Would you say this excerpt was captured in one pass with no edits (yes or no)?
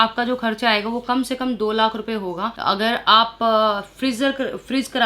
yes